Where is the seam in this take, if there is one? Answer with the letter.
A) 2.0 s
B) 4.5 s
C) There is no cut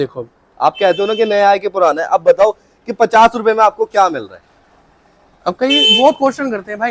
C